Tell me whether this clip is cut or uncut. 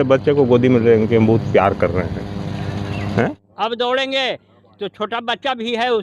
cut